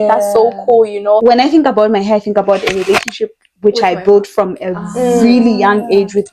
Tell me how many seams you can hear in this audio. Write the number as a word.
one